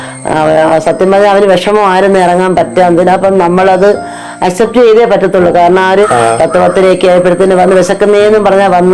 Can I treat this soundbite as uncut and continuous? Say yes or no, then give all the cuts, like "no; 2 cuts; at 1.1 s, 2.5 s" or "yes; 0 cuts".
no; 1 cut; at 6.1 s